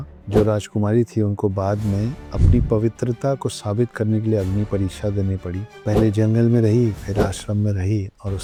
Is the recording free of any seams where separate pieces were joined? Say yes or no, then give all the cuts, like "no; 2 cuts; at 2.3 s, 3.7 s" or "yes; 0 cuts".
yes; 0 cuts